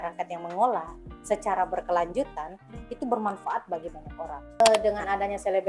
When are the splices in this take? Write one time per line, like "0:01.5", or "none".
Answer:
0:04.6